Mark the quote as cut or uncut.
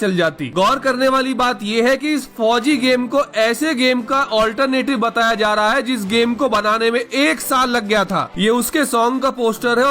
cut